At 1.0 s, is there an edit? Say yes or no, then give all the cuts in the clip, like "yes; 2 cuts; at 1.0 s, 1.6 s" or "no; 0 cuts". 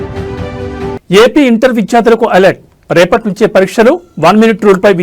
yes; 1 cut; at 1.0 s